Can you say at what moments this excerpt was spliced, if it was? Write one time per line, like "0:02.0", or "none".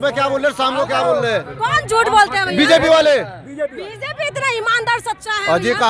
none